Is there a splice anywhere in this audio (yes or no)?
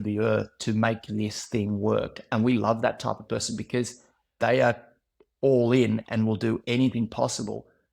yes